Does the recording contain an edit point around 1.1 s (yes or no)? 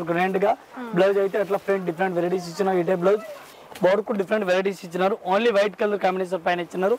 no